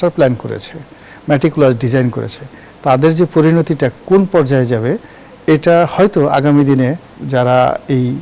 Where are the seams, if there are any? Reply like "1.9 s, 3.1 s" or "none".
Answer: 7.1 s